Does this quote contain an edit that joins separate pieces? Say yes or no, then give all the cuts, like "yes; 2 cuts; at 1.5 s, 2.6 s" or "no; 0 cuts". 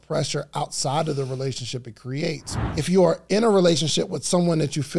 yes; 1 cut; at 2.5 s